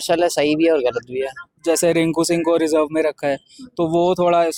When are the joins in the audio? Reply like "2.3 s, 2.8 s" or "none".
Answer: 1.6 s